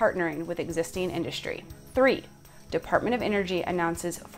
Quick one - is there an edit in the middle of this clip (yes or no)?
yes